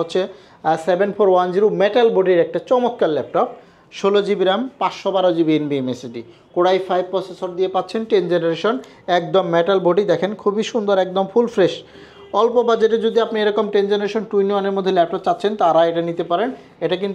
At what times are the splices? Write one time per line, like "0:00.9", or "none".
none